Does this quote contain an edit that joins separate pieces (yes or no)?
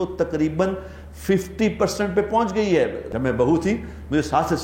yes